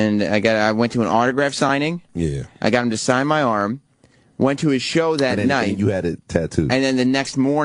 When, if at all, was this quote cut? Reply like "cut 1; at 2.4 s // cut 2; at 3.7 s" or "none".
cut 1; at 1.8 s